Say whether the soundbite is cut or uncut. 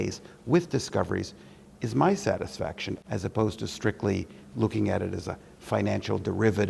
cut